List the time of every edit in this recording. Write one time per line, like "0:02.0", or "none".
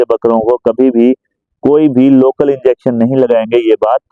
none